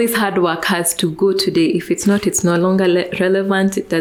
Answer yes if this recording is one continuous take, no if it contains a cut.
yes